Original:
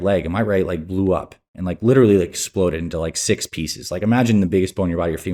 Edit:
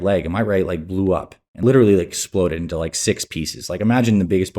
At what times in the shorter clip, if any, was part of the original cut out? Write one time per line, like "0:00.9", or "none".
0:01.4

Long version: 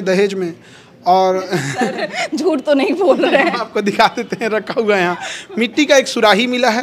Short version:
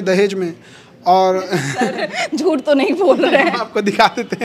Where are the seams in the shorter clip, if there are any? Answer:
none

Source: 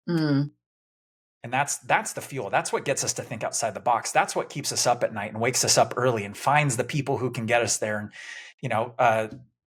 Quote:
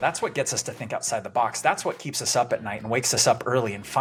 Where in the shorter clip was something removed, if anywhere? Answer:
none

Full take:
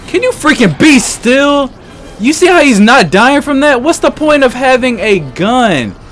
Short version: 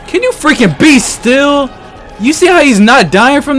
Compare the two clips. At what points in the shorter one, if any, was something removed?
none

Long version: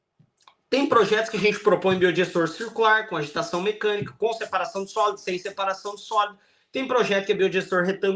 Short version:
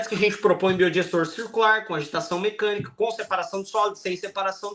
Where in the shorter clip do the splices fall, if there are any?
none

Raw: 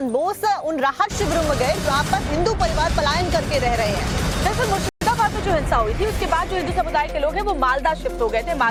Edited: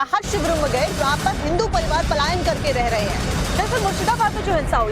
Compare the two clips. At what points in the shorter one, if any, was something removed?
0:04.0

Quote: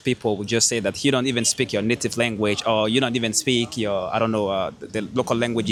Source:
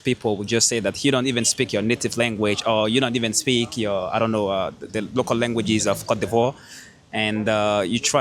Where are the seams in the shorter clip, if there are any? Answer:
none

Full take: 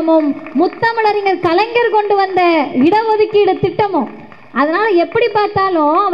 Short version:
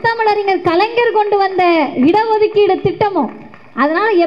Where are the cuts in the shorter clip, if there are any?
none

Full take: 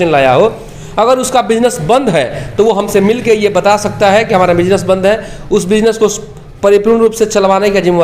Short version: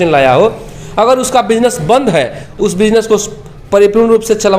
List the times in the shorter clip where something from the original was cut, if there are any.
0:02.4

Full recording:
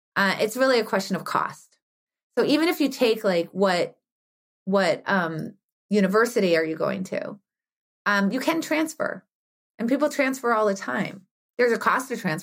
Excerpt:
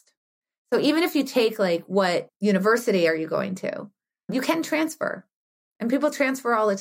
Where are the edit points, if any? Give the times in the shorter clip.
0:02.3
0:04.3

